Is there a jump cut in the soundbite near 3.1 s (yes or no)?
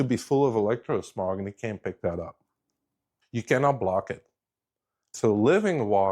yes